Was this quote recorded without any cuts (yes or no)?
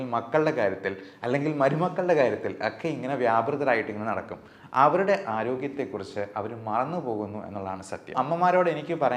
no